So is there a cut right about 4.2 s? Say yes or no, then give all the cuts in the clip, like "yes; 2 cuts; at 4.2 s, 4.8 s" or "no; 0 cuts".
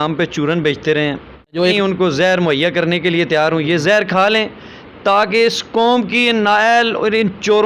no; 1 cut; at 1.7 s